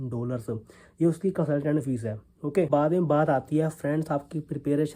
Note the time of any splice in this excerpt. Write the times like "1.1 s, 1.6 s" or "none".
none